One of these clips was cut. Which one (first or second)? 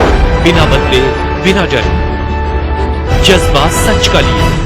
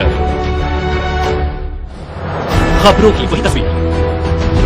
second